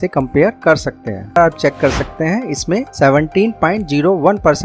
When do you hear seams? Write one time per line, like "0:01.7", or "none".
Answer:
0:01.4